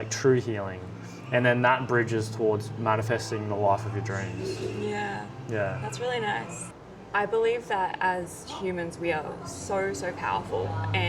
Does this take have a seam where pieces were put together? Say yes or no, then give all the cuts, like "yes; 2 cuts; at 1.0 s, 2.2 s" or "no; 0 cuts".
yes; 1 cut; at 6.7 s